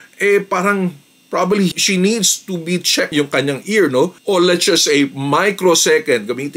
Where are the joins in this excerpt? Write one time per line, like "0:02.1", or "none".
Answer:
0:03.2
0:04.2